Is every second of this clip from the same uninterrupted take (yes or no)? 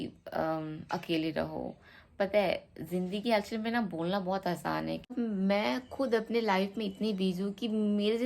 no